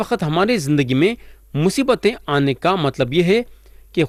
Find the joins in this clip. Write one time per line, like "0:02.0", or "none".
none